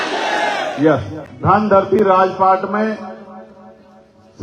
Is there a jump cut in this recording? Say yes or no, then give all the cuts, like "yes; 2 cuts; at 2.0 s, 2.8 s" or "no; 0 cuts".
no; 0 cuts